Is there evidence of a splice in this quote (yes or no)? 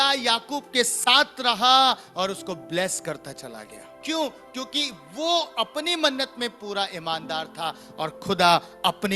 yes